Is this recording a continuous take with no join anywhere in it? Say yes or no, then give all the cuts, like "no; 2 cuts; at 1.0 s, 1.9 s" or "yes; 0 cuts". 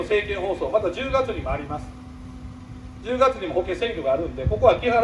yes; 0 cuts